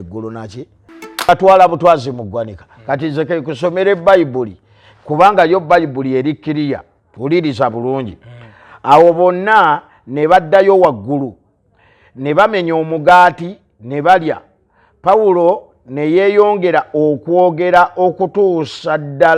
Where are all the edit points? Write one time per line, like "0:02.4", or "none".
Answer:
0:01.3